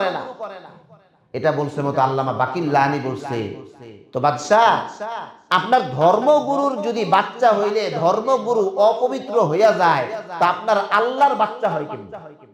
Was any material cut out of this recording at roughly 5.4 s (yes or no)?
no